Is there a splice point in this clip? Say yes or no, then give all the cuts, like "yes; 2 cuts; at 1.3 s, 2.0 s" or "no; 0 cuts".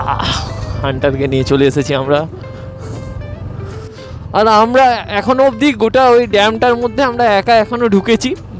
yes; 1 cut; at 3.9 s